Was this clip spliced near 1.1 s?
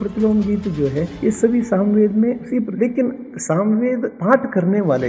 yes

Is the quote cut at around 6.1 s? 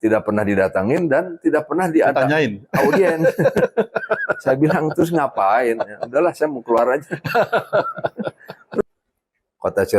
no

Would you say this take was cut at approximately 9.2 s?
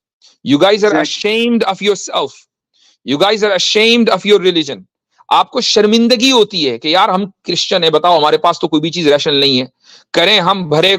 no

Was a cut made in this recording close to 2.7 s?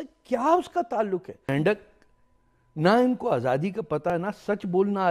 no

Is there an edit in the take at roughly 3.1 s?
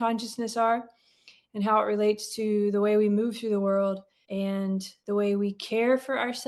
no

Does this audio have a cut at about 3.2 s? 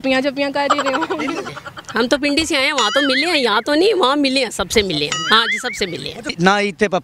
no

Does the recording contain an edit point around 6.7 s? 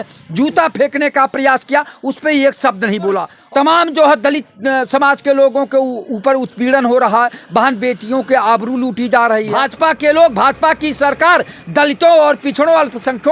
no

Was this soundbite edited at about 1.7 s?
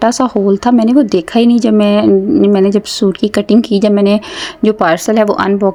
no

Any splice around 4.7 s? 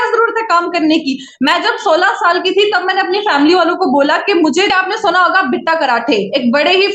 yes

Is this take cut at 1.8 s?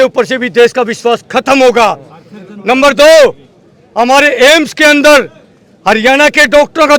no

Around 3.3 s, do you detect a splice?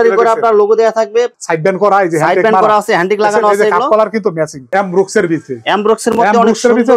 no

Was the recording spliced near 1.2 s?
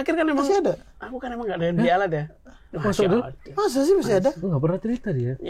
no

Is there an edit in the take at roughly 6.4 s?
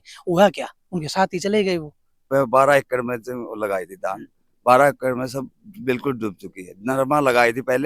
no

